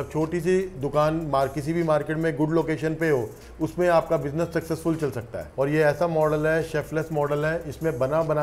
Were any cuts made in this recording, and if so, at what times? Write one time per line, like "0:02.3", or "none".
0:05.4